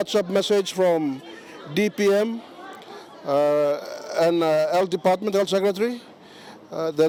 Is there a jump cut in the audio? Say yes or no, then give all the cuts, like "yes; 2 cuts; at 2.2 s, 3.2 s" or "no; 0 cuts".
no; 0 cuts